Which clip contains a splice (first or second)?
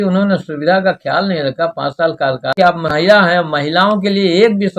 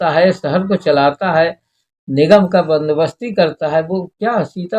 first